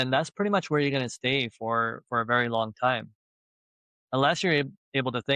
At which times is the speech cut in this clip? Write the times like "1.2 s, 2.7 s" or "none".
none